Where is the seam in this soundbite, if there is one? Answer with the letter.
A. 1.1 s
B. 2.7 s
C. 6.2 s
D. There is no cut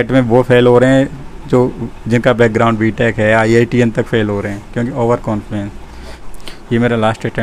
C